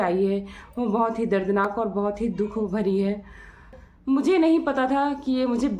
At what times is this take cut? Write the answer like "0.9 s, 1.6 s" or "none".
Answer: 3.8 s